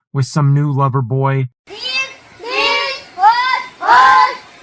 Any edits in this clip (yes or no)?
yes